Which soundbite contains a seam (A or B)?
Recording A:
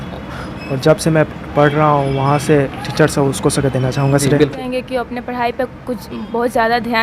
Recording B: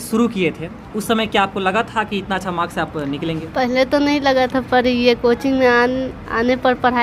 A